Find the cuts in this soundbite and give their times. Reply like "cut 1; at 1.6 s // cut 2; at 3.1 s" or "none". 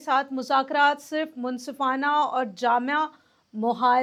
none